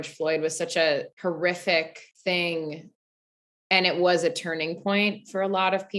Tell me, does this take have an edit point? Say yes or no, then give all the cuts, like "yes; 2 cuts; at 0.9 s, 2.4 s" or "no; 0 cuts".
yes; 2 cuts; at 1.1 s, 2.0 s